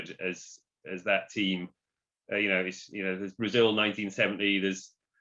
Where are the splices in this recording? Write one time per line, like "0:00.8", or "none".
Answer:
none